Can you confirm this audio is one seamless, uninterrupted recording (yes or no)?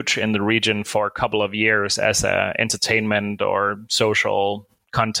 yes